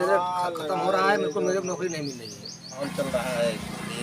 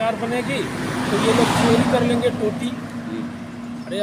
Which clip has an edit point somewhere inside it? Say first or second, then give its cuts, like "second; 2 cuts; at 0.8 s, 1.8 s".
first; 1 cut; at 2.8 s